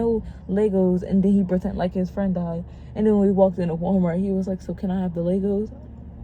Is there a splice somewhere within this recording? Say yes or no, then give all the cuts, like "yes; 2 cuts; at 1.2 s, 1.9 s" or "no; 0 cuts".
no; 0 cuts